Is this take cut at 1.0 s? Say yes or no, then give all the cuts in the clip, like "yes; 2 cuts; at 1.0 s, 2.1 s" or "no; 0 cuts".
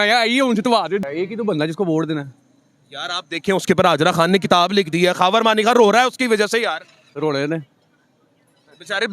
yes; 1 cut; at 1.0 s